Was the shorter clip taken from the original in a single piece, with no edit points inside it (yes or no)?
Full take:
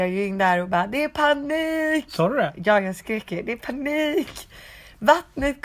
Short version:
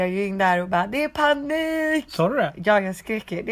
yes